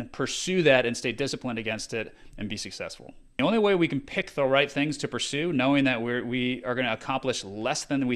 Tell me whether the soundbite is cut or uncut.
cut